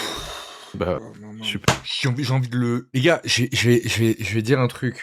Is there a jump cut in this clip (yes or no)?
no